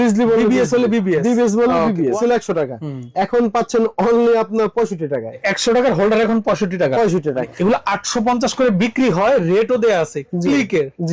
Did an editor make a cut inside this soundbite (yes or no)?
yes